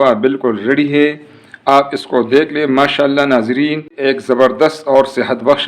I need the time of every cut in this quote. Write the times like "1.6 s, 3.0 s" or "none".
3.9 s